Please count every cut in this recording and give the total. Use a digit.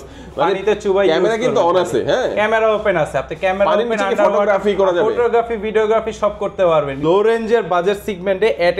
1